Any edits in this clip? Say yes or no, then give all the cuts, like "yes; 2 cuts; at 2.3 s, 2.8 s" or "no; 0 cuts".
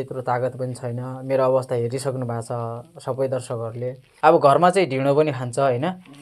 yes; 1 cut; at 4.0 s